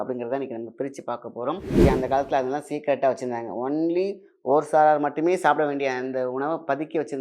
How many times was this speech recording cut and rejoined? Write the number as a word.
one